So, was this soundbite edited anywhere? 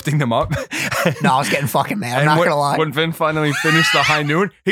no; 0 cuts

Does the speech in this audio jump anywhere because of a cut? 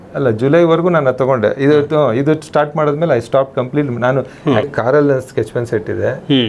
yes; 1 cut; at 4.7 s

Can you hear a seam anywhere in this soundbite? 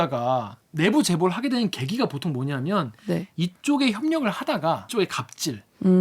yes; 1 cut; at 4.9 s

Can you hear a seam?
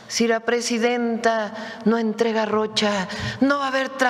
no; 0 cuts

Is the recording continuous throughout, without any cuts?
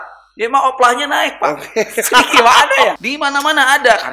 no; 1 cut; at 3.1 s

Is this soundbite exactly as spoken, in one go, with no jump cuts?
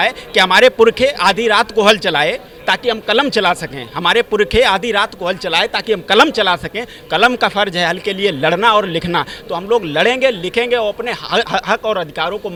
yes; 0 cuts

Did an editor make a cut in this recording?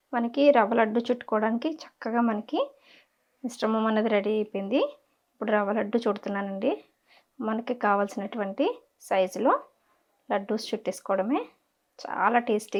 no; 0 cuts

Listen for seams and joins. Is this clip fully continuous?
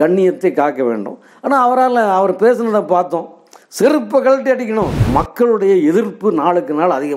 no; 1 cut; at 5.0 s

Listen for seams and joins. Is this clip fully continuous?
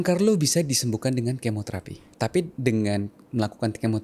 no; 1 cut; at 2.5 s

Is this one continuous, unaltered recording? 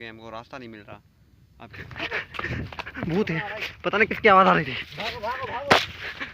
no; 1 cut; at 1.7 s

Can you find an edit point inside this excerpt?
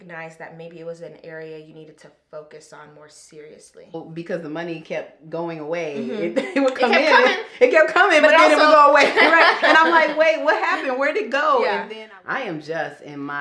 yes; 2 cuts; at 3.9 s, 11.9 s

